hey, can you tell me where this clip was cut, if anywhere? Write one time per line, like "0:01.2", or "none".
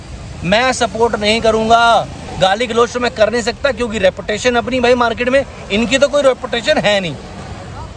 0:02.2